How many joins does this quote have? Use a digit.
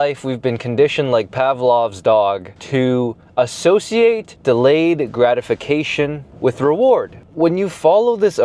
4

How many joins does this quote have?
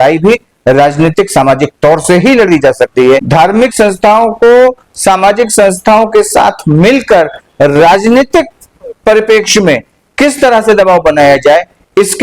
1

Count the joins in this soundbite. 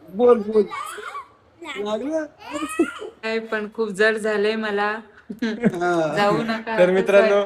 1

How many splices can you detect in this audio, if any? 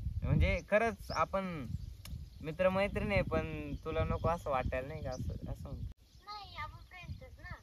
1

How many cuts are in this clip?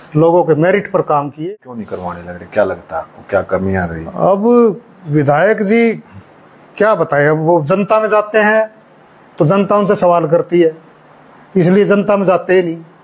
1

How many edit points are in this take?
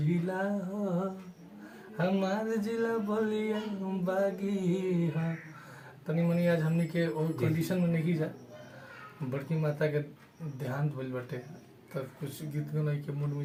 0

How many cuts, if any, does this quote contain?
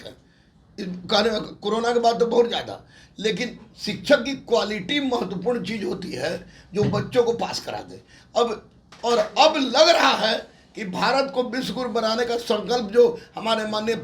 1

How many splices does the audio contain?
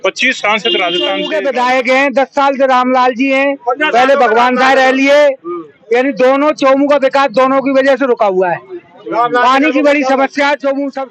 1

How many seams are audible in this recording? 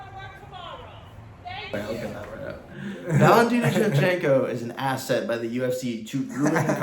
1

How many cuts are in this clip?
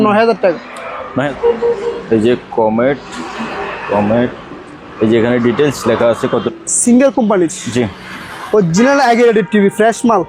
2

